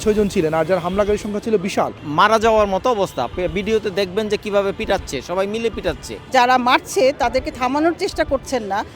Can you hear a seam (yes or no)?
yes